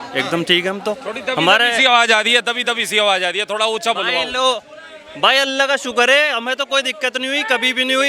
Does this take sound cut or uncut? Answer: uncut